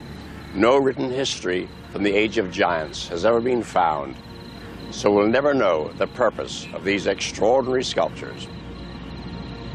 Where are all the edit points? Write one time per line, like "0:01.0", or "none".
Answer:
0:08.7